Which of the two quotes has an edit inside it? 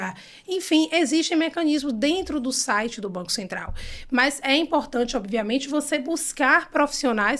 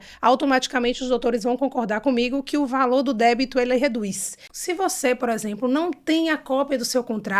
second; 1 cut; at 4.4 s

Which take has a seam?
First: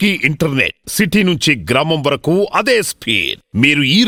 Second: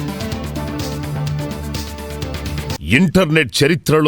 second; 1 cut; at 2.7 s

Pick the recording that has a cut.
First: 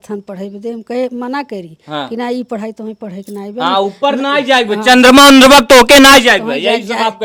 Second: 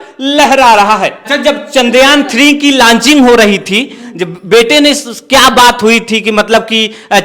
second; 1 cut; at 1.2 s

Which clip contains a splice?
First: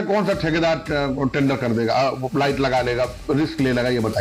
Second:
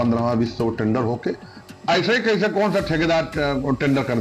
second; 1 cut; at 1.5 s

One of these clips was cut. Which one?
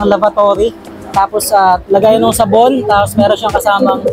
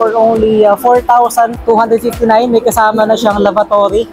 second; 1 cut; at 1.6 s

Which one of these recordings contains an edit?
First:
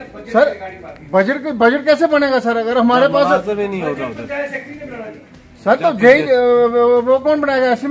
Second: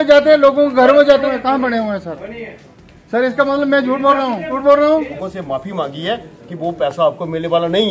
second; 3 cuts; at 1.2 s, 4.6 s, 5.2 s

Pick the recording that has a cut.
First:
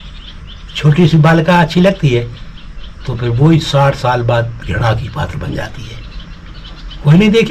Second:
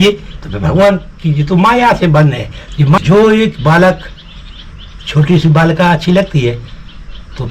second; 1 cut; at 3.0 s

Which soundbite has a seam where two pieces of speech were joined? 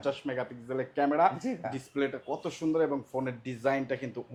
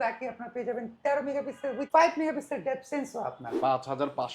second; 2 cuts; at 1.8 s, 3.5 s

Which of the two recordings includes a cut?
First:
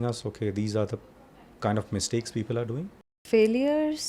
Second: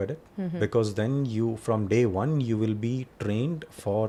first; 1 cut; at 3.1 s

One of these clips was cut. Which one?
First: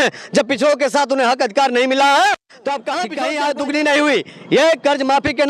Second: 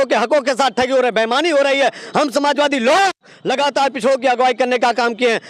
first; 1 cut; at 3.2 s

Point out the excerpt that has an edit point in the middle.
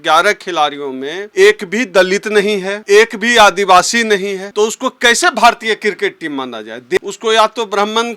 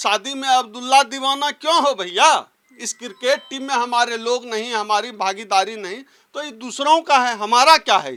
first; 4 cuts; at 1.2 s, 2.7 s, 4.4 s, 7.0 s

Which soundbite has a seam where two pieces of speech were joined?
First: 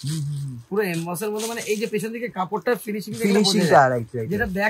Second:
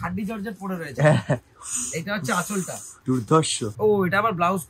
second; 2 cuts; at 2.8 s, 3.7 s

